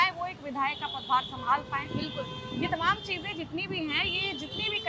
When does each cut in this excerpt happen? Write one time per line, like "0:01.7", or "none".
none